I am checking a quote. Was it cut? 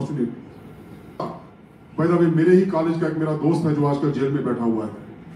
yes; 1 cut; at 1.2 s

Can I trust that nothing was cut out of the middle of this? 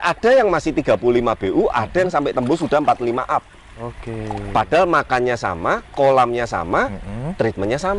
yes; 0 cuts

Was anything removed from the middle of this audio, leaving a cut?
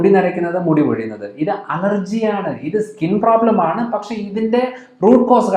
no; 0 cuts

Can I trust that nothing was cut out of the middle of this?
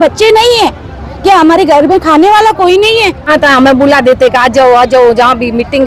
no; 1 cut; at 3.3 s

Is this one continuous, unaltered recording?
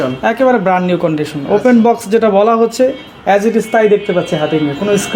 yes; 0 cuts

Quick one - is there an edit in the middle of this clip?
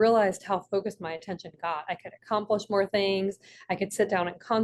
no; 0 cuts

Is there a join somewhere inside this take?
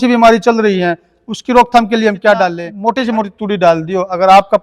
yes; 1 cut; at 2.7 s

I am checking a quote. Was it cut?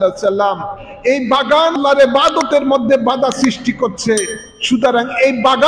yes; 1 cut; at 1.8 s

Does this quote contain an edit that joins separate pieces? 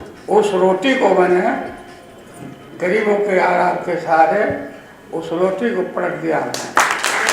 no; 0 cuts

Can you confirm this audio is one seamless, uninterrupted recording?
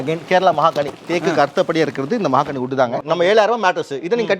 no; 1 cut; at 3.0 s

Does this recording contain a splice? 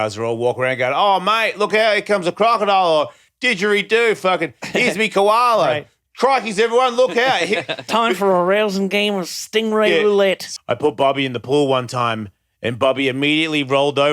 yes; 1 cut; at 10.4 s

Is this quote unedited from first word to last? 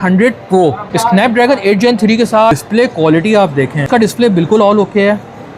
no; 3 cuts; at 0.9 s, 2.6 s, 3.9 s

